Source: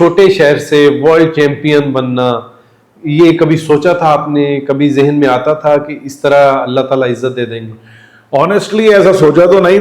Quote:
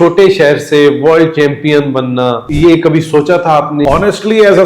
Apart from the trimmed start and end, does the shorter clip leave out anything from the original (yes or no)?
yes